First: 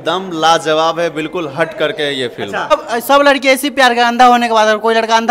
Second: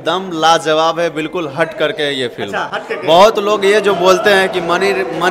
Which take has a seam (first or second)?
first